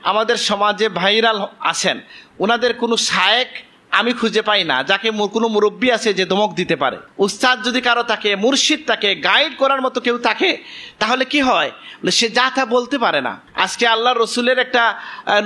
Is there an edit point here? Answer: yes; 2 cuts; at 7.0 s, 13.4 s

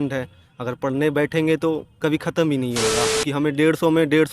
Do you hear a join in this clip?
yes; 1 cut; at 3.2 s

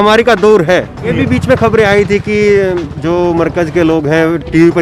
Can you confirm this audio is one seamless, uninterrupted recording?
no; 1 cut; at 1.1 s

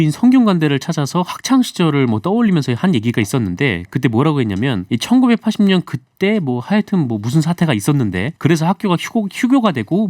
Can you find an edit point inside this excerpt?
yes; 2 cuts; at 4.8 s, 8.3 s

